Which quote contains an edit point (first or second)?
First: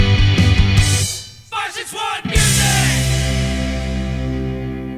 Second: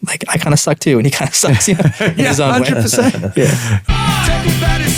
second